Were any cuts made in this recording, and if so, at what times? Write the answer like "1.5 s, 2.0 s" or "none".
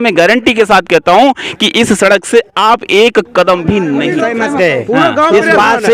4.1 s